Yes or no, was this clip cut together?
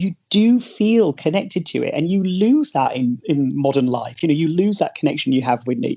yes